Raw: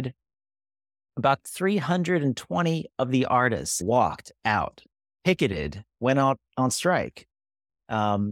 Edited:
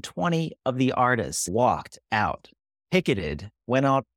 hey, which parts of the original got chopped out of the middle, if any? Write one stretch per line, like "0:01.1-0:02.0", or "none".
none